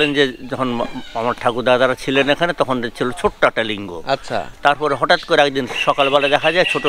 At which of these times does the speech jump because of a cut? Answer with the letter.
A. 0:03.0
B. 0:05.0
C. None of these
C